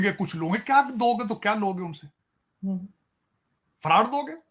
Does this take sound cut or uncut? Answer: uncut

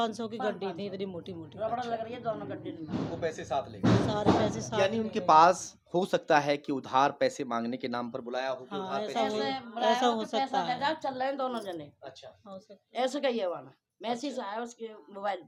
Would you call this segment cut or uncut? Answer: uncut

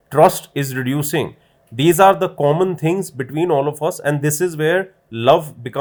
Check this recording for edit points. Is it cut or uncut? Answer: uncut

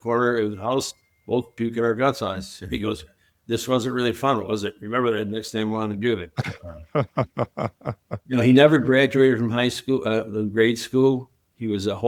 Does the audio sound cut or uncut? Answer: uncut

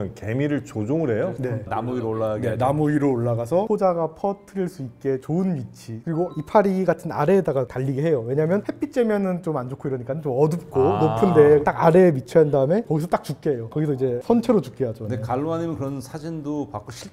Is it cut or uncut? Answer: uncut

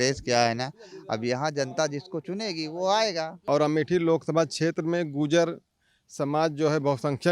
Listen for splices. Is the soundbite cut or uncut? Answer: cut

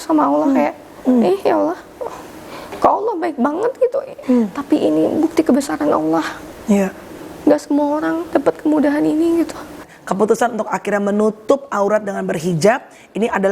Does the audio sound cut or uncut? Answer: cut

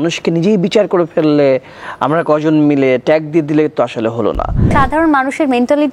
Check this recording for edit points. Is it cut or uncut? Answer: cut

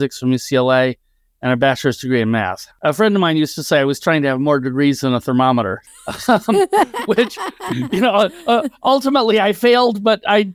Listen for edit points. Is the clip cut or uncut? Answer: cut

